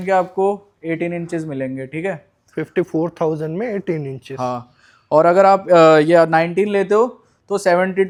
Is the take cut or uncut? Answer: uncut